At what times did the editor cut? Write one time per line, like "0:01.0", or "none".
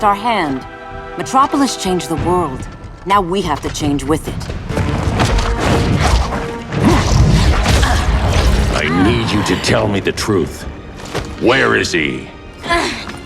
0:04.7